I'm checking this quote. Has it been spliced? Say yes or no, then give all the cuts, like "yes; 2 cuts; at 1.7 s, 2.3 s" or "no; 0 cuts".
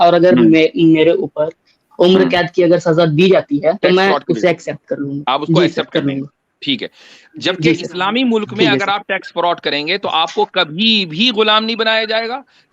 yes; 2 cuts; at 3.8 s, 5.2 s